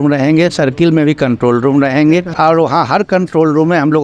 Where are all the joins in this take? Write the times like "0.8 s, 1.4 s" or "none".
2.3 s